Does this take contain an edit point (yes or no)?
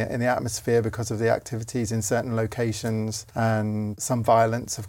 yes